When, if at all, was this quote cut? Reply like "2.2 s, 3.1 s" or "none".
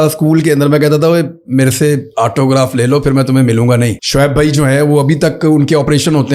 4.0 s